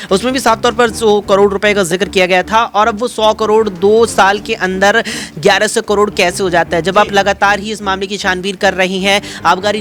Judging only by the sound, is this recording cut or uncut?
uncut